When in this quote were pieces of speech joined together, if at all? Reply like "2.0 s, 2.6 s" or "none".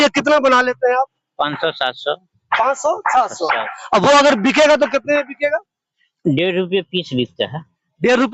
none